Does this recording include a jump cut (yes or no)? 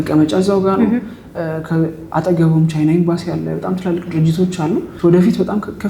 yes